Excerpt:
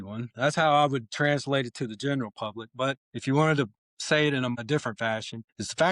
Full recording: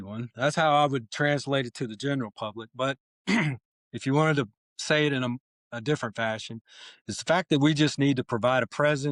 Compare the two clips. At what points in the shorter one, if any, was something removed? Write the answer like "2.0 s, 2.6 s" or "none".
3.1 s, 5.0 s